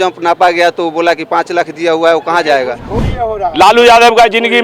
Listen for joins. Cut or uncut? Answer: cut